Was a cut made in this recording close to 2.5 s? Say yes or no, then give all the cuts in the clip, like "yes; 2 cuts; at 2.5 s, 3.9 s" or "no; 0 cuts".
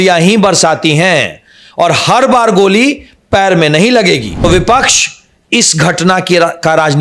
no; 1 cut; at 4.4 s